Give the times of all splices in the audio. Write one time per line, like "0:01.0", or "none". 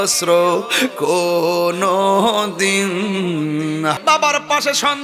0:04.0